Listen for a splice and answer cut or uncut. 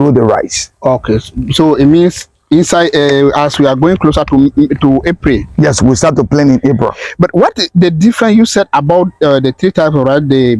uncut